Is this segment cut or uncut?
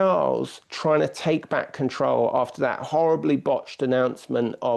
uncut